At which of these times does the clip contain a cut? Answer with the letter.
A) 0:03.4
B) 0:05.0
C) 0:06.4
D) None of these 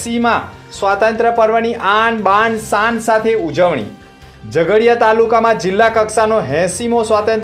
D